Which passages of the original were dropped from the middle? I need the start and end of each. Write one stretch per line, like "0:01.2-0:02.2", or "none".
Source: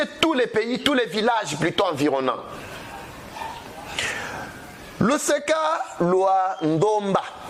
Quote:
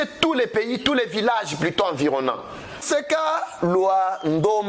0:02.8-0:05.2